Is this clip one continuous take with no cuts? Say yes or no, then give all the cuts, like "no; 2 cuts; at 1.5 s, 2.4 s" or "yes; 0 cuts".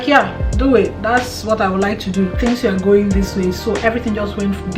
no; 1 cut; at 2.4 s